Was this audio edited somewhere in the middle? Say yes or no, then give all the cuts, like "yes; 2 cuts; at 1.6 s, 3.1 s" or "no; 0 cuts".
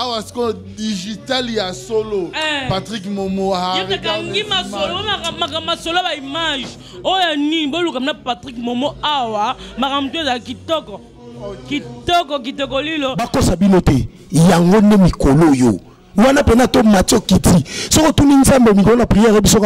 no; 0 cuts